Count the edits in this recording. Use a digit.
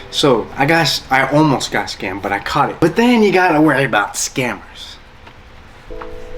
1